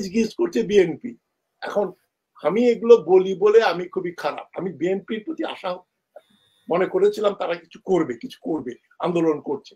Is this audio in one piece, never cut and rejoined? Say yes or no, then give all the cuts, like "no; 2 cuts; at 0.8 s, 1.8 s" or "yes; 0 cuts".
yes; 0 cuts